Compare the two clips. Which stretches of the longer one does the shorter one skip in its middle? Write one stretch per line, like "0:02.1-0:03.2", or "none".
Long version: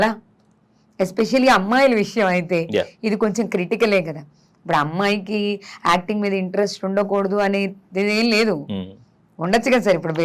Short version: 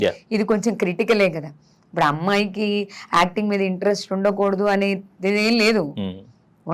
none

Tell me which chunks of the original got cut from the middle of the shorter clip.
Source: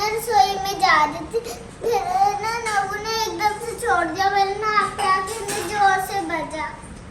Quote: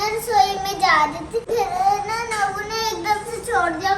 0:01.4-0:01.8

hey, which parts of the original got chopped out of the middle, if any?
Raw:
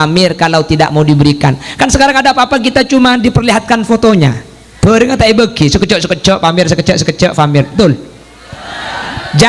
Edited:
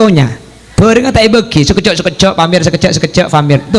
none

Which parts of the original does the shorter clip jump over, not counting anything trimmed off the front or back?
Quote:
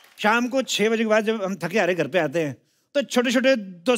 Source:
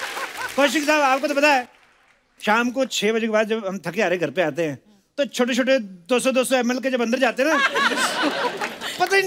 none

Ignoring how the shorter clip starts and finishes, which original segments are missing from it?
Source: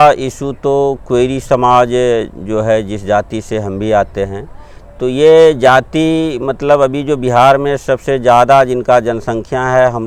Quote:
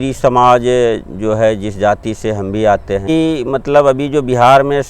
0:04.3-0:06.0

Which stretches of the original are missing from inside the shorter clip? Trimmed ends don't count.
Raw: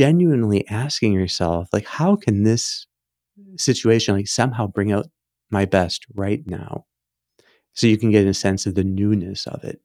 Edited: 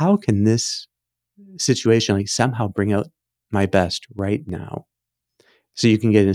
none

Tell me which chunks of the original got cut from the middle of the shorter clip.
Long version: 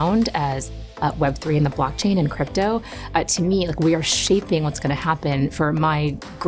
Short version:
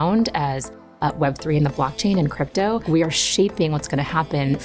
0:02.8-0:03.8

